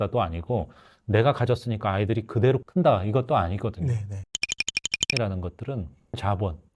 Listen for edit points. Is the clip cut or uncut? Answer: uncut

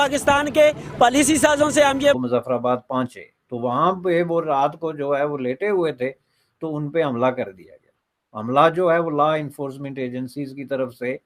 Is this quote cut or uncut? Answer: uncut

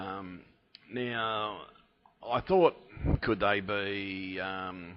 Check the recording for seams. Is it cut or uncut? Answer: cut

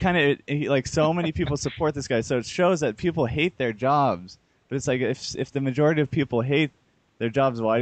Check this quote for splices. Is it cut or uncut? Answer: cut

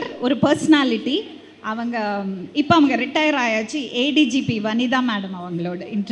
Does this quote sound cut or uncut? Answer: uncut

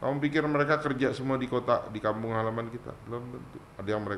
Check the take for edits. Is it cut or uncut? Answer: uncut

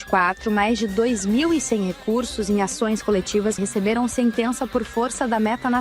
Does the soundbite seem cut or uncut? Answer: cut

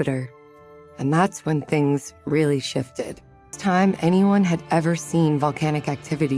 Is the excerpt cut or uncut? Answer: cut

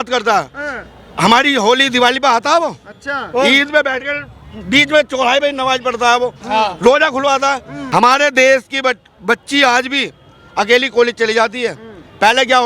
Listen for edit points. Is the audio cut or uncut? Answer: cut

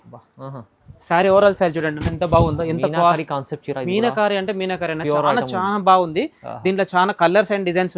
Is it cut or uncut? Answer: uncut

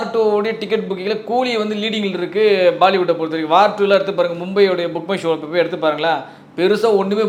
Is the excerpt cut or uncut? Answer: uncut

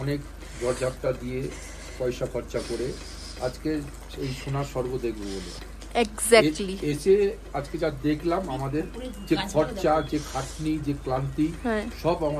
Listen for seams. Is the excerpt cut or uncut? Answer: uncut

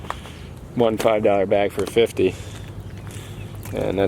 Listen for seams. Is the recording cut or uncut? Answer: uncut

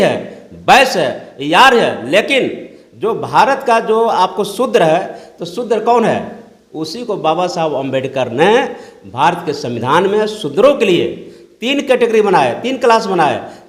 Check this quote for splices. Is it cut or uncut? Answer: uncut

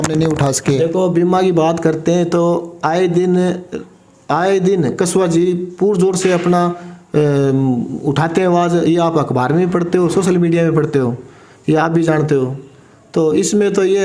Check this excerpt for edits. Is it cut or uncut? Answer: uncut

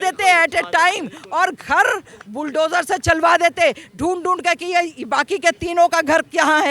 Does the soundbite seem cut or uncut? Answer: uncut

